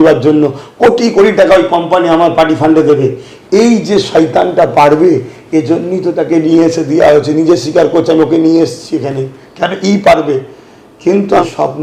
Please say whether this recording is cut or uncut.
uncut